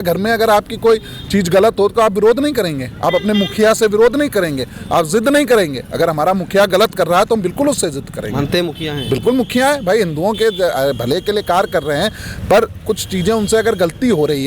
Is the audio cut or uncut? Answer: uncut